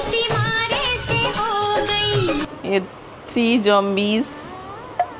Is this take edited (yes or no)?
yes